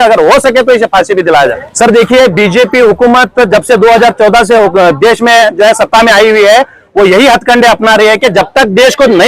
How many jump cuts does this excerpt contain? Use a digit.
1